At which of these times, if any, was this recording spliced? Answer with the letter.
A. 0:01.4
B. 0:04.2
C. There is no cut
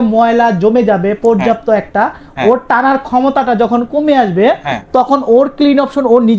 C